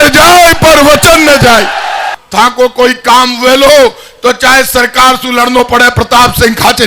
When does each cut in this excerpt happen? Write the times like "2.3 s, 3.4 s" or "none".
2.1 s